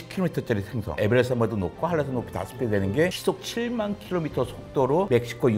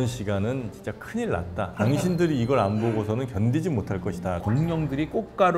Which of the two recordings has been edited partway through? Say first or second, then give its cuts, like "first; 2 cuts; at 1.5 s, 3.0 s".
second; 2 cuts; at 1.7 s, 4.4 s